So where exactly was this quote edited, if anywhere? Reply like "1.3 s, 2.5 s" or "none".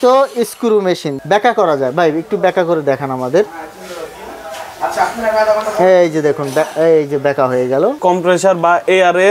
1.1 s, 8.0 s